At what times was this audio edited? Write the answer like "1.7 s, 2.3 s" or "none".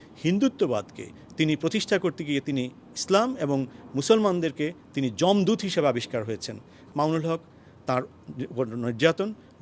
6.9 s